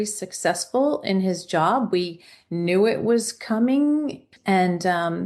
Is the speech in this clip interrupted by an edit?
yes; 1 cut; at 4.3 s

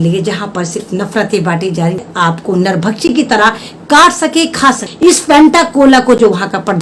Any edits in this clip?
yes; 2 cuts; at 2.0 s, 4.9 s

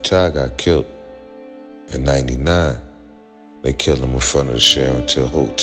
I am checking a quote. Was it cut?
no; 0 cuts

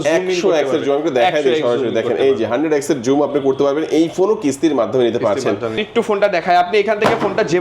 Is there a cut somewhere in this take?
yes; 1 cut; at 5.8 s

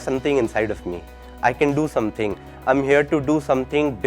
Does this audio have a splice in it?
no; 0 cuts

